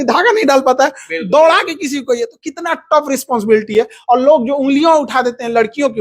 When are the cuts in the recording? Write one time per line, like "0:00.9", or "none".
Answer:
none